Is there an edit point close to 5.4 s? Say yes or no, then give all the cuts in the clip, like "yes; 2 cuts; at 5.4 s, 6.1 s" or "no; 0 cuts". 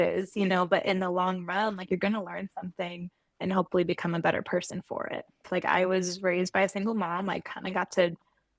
yes; 1 cut; at 5.4 s